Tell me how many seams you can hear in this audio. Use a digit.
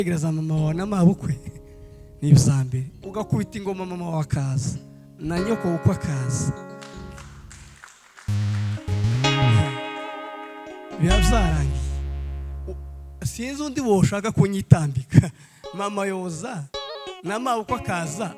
0